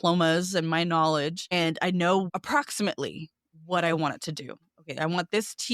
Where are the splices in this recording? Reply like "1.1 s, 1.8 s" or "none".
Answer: 1.4 s, 2.3 s